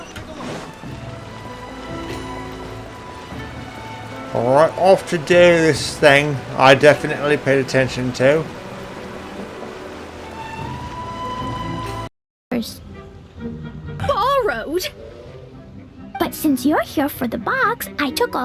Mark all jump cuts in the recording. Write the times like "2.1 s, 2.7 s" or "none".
none